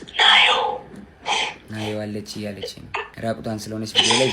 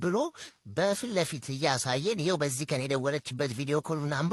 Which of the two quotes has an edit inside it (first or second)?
first